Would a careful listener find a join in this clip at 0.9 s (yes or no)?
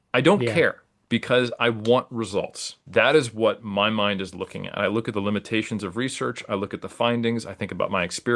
yes